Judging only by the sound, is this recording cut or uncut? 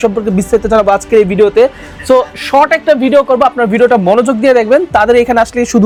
uncut